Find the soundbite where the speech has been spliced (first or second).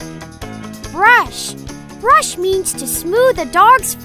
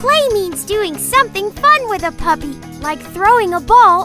first